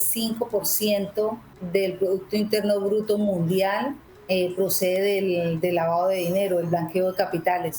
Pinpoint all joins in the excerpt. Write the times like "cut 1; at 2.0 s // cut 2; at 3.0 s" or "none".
cut 1; at 1.5 s // cut 2; at 4.1 s